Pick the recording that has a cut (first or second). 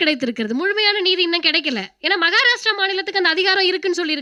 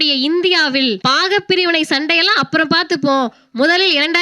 second